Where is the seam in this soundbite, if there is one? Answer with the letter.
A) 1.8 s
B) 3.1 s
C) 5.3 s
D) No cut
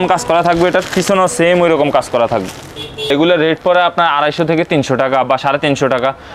B